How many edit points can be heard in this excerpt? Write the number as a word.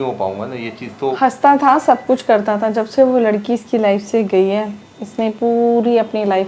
one